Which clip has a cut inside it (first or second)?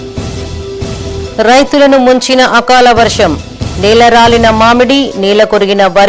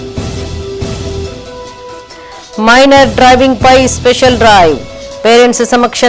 first